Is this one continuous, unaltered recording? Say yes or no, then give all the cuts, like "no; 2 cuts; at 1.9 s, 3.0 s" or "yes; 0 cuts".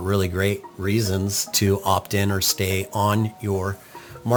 yes; 0 cuts